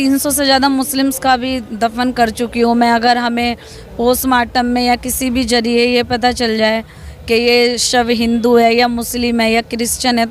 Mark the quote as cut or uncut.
uncut